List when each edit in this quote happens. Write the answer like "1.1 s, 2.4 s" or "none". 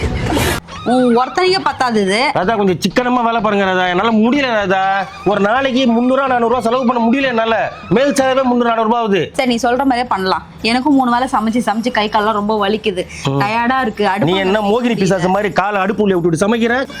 9.3 s